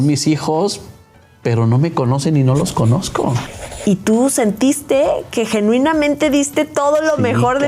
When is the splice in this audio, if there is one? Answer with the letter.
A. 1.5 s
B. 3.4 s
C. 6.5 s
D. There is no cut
B